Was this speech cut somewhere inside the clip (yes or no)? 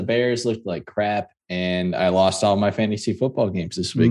no